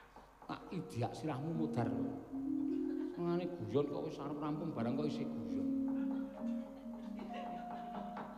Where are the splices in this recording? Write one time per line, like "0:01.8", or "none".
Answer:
none